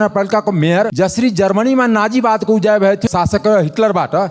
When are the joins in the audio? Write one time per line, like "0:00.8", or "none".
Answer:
0:00.9
0:03.0